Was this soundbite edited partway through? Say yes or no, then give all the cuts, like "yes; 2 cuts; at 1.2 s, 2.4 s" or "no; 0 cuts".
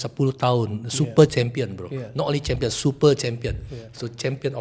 no; 0 cuts